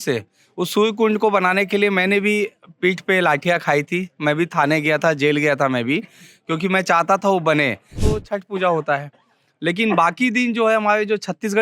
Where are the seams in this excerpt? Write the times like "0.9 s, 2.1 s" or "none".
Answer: 8.1 s